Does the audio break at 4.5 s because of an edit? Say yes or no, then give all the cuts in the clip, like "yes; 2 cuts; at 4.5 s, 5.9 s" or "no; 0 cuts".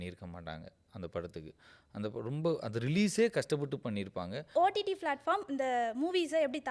yes; 1 cut; at 4.5 s